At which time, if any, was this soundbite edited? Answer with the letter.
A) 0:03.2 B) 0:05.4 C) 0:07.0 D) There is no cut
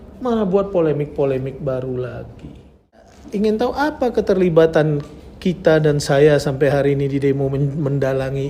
A